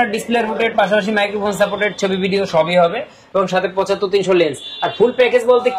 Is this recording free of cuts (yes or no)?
yes